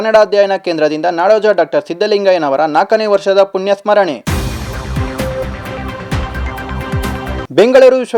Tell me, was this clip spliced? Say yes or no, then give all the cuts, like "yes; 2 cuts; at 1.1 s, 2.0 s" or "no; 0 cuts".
no; 0 cuts